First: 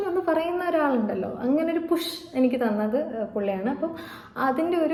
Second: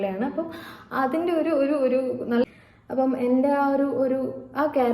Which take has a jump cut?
second; 1 cut; at 2.5 s

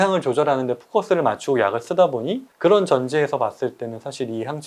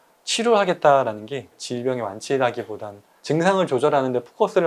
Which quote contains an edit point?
first; 1 cut; at 2.4 s

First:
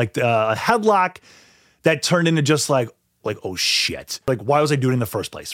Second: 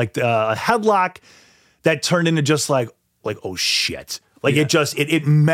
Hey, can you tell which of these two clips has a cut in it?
first; 1 cut; at 4.3 s

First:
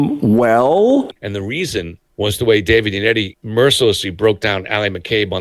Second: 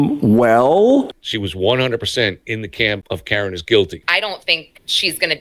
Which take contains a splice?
second; 3 cuts; at 1.2 s, 3.0 s, 4.0 s

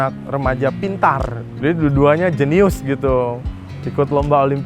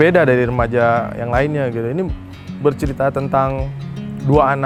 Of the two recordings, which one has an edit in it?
first; 1 cut; at 1.4 s

